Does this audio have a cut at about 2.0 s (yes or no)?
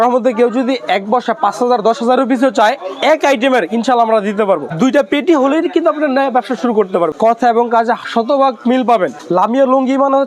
no